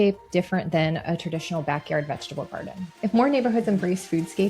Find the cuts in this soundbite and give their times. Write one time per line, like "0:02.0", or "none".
0:03.0